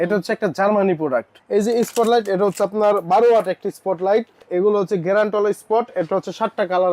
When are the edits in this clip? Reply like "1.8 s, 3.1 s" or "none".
1.4 s, 4.5 s